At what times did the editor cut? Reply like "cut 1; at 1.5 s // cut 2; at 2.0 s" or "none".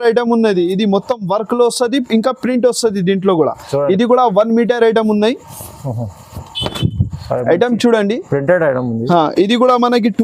none